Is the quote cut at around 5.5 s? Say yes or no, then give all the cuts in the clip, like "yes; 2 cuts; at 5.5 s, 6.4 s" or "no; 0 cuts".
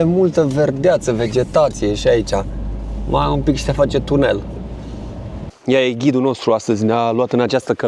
yes; 1 cut; at 5.5 s